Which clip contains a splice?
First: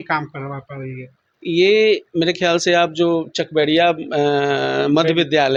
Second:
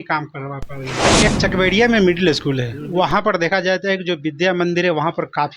second; 1 cut; at 1.2 s

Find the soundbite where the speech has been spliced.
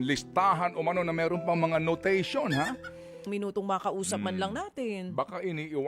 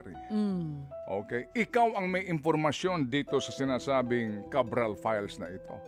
first; 1 cut; at 3.3 s

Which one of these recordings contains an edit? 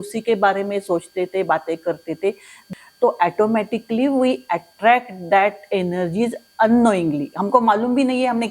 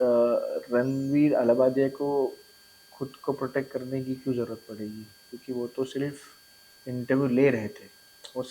first; 1 cut; at 2.7 s

